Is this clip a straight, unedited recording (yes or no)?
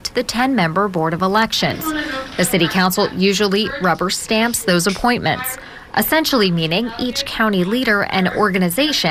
yes